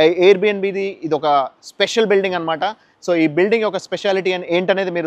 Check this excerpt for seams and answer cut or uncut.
uncut